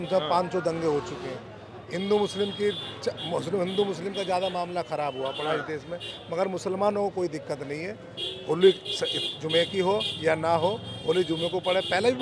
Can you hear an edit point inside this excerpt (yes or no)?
no